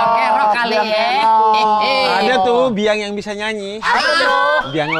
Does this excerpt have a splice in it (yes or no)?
no